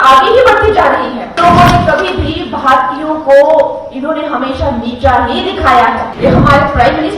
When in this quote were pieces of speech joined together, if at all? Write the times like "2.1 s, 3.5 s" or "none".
1.3 s, 6.1 s